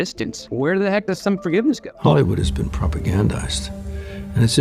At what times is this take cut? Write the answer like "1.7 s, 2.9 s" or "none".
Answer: 1.9 s